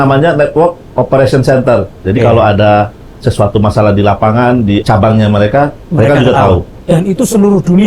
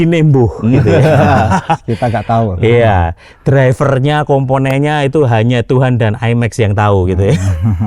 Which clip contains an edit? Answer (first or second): first